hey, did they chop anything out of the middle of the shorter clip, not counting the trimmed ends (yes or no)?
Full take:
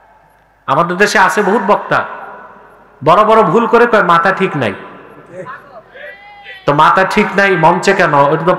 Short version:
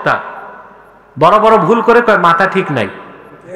no